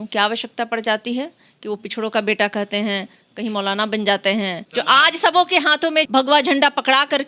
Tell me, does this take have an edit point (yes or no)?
yes